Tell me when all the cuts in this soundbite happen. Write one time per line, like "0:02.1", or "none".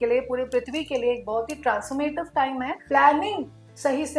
0:02.8